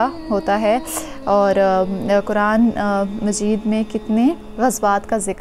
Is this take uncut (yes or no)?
no